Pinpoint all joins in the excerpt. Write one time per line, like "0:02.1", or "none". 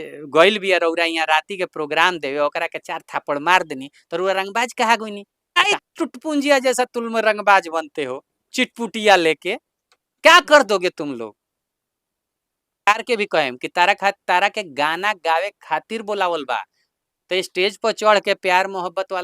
0:05.8
0:12.9